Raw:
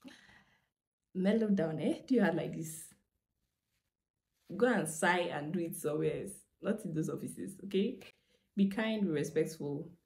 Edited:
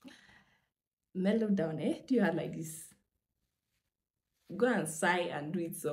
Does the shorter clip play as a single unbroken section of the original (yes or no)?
yes